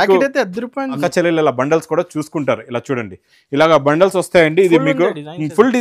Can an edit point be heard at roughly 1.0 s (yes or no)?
yes